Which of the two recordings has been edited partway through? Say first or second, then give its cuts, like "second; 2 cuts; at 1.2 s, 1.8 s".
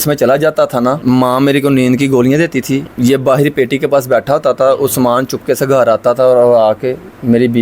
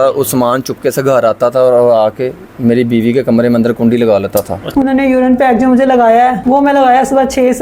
second; 1 cut; at 4.6 s